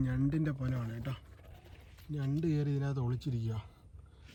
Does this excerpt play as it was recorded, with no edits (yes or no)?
yes